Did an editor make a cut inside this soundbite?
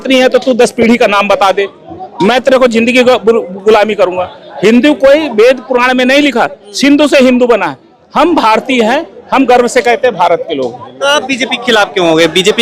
no; 0 cuts

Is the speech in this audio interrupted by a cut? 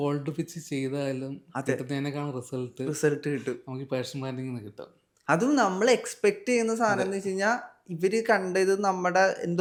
no; 0 cuts

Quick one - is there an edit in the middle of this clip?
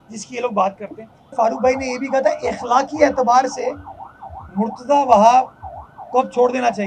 yes; 1 cut; at 1.3 s

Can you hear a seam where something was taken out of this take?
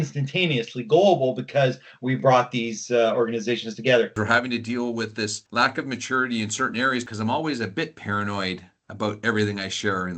yes; 2 cuts; at 4.1 s, 7.0 s

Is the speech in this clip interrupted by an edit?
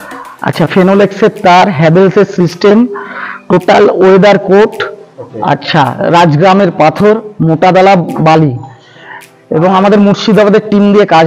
no; 0 cuts

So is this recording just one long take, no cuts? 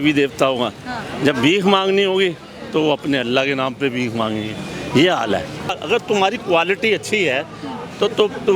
no; 1 cut; at 5.8 s

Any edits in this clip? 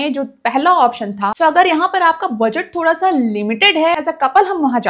yes; 2 cuts; at 1.3 s, 4.0 s

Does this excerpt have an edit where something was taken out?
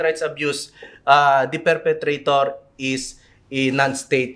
no; 0 cuts

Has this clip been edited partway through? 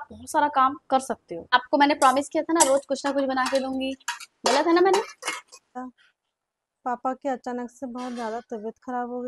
yes; 2 cuts; at 1.5 s, 5.7 s

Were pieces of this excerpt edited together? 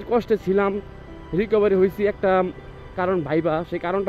no; 0 cuts

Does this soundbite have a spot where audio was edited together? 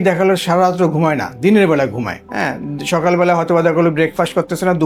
no; 0 cuts

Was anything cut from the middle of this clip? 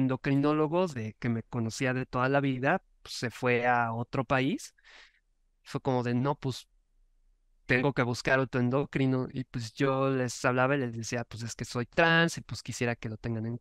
no; 0 cuts

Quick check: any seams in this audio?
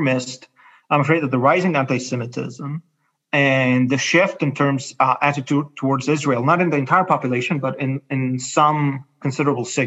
no; 0 cuts

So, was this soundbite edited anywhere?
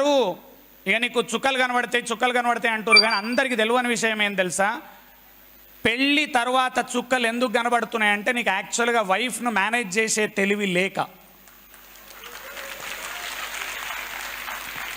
no; 0 cuts

